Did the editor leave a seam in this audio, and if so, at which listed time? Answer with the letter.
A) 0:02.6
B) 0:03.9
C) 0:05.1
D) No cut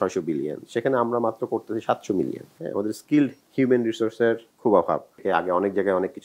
C